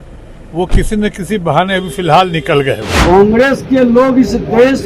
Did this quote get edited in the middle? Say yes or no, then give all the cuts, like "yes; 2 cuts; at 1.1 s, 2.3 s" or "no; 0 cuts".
yes; 1 cut; at 2.9 s